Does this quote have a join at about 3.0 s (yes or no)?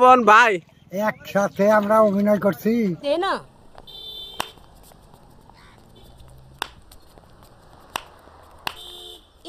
yes